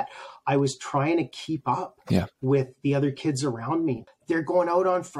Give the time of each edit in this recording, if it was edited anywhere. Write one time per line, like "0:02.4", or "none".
0:04.1